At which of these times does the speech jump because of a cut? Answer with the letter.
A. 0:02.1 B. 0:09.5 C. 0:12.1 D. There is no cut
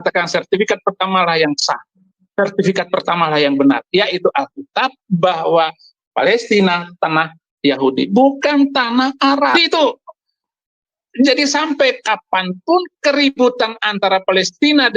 B